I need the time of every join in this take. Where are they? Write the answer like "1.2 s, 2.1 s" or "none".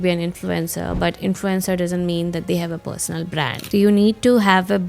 3.5 s